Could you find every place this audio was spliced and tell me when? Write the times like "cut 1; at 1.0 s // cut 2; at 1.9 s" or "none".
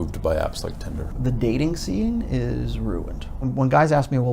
cut 1; at 1.2 s // cut 2; at 3.4 s